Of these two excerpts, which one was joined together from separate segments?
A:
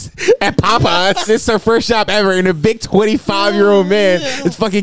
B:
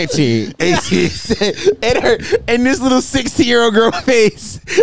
A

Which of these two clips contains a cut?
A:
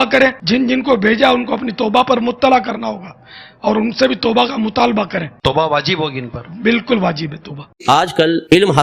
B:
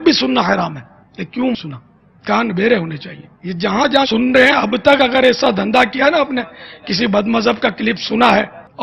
A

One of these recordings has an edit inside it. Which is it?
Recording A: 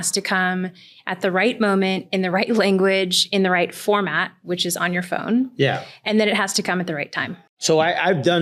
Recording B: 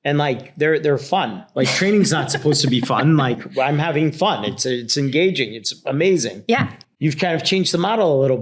B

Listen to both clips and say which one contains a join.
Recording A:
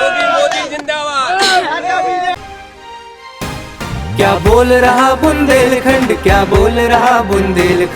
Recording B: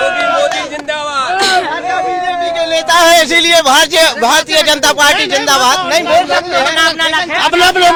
A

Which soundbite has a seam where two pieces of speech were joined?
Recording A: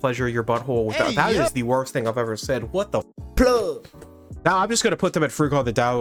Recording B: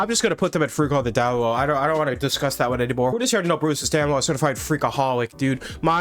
B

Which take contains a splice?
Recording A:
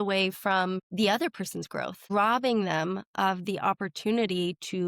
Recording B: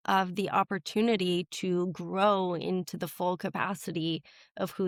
A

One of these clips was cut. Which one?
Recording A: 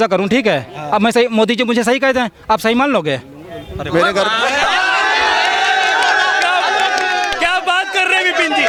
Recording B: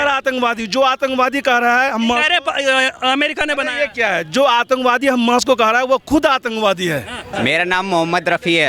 B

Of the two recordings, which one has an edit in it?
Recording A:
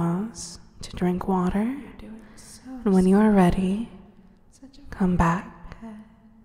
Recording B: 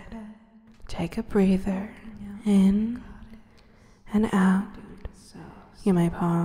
A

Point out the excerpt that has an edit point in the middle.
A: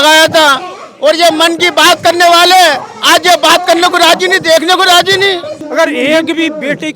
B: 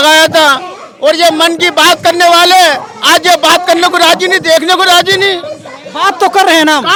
A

